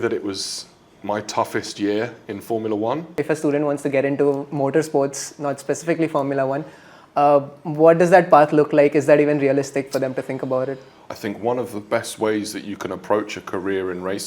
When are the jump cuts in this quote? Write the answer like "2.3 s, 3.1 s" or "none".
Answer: 3.2 s, 11.0 s